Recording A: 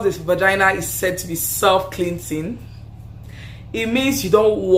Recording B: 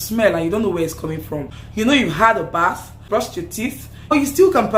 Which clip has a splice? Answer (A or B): B